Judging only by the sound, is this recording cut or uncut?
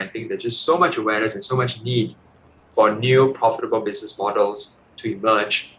uncut